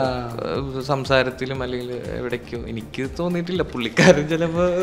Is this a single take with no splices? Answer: yes; 0 cuts

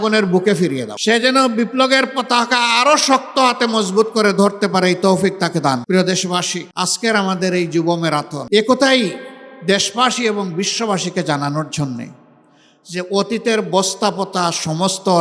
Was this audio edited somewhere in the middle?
yes; 4 cuts; at 0.9 s, 5.8 s, 6.6 s, 8.4 s

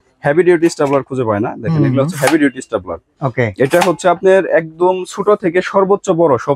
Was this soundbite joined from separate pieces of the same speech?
no; 0 cuts

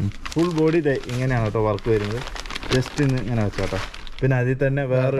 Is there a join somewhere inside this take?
no; 0 cuts

